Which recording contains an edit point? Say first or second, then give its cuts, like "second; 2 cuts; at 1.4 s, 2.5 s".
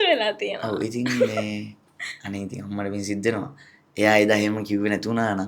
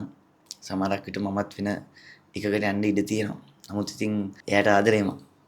second; 1 cut; at 4.4 s